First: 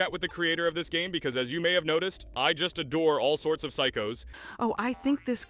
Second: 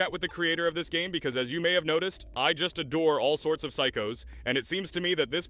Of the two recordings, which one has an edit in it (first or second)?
first